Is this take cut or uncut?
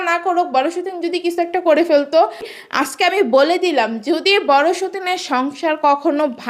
cut